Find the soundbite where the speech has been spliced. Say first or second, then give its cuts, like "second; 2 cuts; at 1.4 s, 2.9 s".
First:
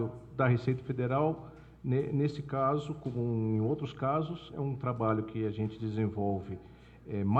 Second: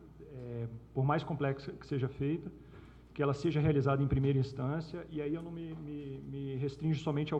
first; 1 cut; at 5.8 s